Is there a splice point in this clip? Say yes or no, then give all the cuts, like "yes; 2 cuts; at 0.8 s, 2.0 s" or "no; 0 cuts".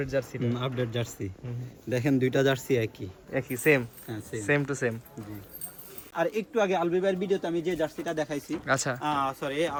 no; 0 cuts